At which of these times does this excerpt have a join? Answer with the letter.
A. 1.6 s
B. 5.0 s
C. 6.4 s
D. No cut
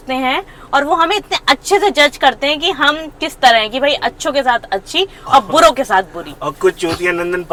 D